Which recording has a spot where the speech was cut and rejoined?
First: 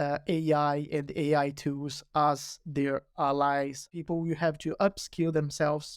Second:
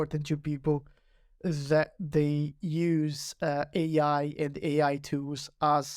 first; 1 cut; at 3.9 s

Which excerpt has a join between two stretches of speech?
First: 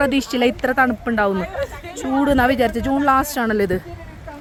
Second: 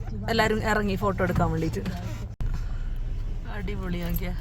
second; 1 cut; at 2.3 s

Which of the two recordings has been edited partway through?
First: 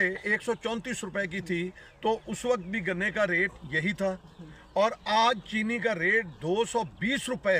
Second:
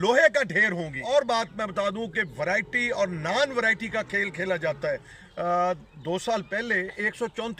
second; 2 cuts; at 1.0 s, 5.2 s

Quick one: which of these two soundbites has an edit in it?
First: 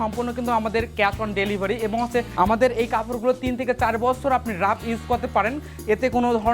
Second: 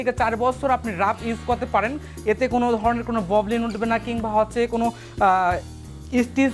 first; 1 cut; at 2.3 s

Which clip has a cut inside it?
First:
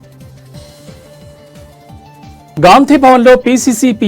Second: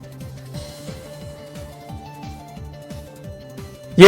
first; 1 cut; at 2.5 s

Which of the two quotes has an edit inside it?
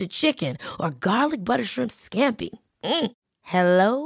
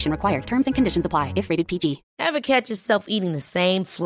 second; 1 cut; at 2.1 s

